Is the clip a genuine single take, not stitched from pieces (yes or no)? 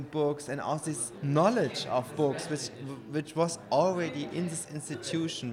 no